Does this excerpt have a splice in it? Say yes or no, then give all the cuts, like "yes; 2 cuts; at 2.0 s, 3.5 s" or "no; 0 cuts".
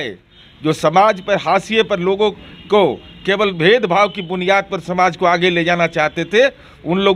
no; 0 cuts